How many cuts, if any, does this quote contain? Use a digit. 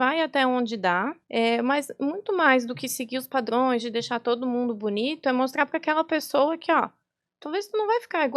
1